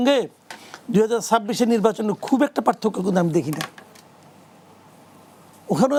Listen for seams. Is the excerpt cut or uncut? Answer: uncut